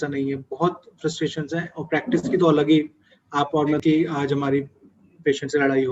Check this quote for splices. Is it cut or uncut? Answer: cut